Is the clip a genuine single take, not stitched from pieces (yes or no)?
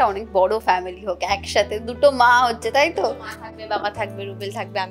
yes